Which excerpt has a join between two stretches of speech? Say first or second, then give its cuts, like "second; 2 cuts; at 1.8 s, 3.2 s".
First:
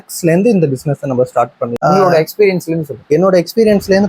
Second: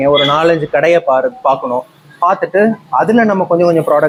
first; 1 cut; at 1.6 s